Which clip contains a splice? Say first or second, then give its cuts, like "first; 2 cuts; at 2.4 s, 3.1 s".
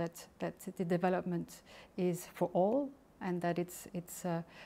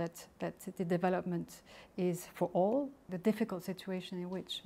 second; 1 cut; at 3.1 s